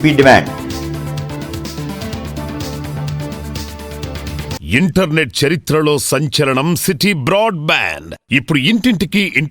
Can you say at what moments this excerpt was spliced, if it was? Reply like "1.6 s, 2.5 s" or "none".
4.5 s